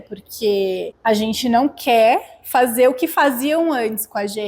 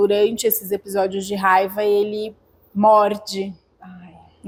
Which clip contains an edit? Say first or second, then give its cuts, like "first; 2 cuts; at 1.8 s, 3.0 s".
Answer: first; 1 cut; at 0.9 s